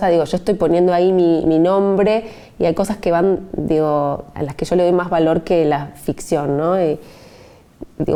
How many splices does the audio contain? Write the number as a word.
zero